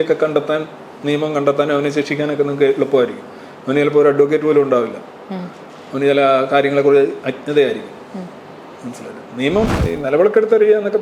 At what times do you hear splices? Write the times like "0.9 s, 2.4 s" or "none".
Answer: 9.7 s